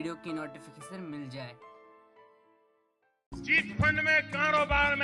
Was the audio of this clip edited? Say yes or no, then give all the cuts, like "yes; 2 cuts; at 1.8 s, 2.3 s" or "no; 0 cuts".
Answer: yes; 1 cut; at 3.3 s